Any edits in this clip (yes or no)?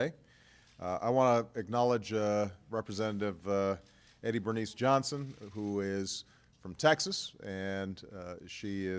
yes